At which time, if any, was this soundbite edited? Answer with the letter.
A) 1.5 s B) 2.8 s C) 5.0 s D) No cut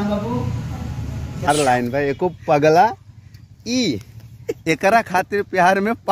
A